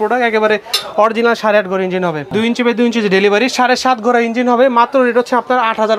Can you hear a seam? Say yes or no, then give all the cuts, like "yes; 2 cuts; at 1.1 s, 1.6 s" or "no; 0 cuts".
yes; 1 cut; at 2.3 s